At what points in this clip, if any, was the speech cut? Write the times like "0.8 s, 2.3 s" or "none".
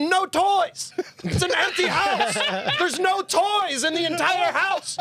none